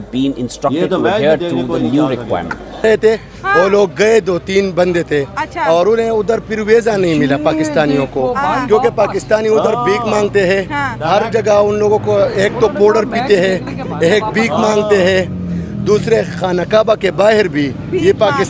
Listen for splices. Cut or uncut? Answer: cut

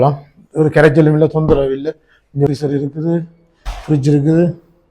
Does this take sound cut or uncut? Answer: cut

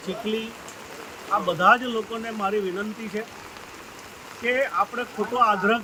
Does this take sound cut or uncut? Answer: uncut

